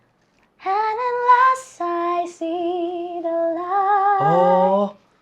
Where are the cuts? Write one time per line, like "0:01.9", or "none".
none

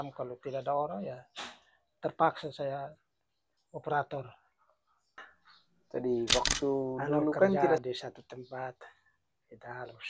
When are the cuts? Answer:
0:07.8

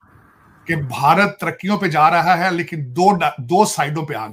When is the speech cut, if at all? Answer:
none

